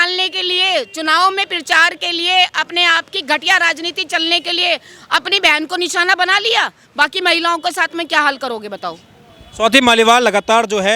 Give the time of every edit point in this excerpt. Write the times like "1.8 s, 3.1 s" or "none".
none